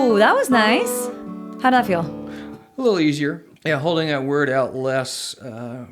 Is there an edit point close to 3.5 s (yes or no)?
yes